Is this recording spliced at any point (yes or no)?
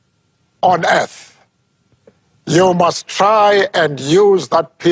no